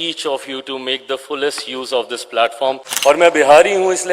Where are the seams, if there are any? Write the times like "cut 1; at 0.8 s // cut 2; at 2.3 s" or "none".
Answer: cut 1; at 2.9 s